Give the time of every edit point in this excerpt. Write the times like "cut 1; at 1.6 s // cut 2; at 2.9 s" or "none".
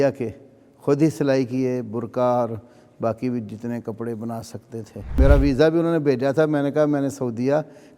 cut 1; at 5.2 s